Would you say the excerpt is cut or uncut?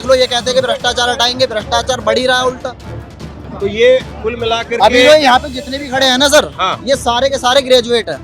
cut